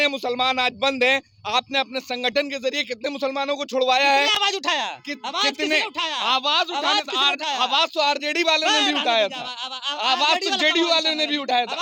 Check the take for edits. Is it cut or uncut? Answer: uncut